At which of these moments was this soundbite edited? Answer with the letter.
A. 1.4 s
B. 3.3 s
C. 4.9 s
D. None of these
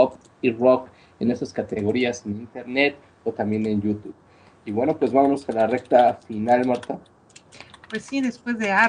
C